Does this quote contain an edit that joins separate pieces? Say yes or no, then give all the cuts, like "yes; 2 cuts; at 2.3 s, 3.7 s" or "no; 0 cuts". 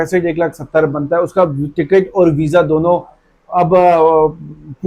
no; 0 cuts